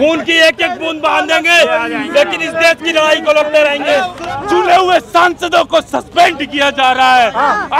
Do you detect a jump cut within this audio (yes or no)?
yes